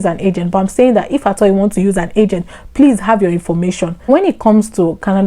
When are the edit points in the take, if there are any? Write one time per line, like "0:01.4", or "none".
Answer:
0:04.0